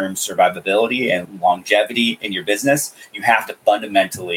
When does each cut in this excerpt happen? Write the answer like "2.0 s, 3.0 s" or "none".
1.2 s